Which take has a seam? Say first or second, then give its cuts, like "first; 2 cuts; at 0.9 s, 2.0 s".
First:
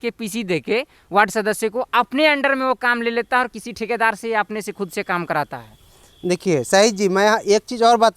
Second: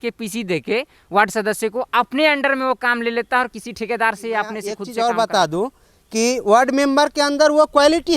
second; 1 cut; at 4.8 s